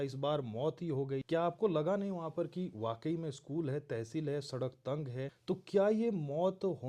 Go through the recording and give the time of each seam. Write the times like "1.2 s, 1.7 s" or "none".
1.2 s, 5.4 s